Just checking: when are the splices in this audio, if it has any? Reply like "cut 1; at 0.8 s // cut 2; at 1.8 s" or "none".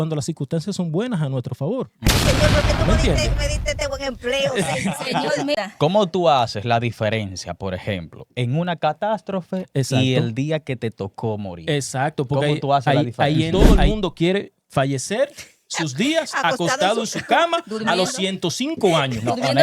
cut 1; at 5.6 s // cut 2; at 13.5 s